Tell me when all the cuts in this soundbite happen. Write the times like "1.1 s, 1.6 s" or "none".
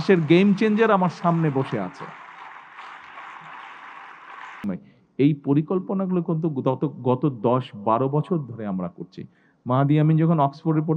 4.6 s